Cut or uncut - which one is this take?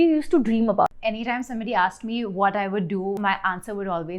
cut